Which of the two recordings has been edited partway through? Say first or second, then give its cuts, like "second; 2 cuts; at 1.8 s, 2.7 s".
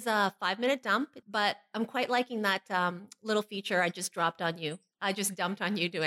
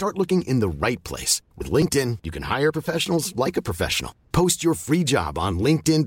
first; 3 cuts; at 1.2 s, 2.3 s, 4.9 s